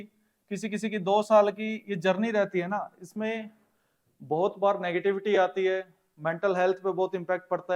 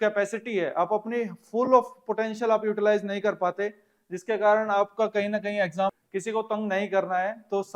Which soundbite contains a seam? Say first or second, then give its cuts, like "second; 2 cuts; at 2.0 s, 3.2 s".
second; 1 cut; at 5.9 s